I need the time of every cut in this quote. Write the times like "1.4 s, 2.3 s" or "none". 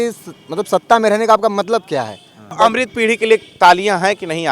2.5 s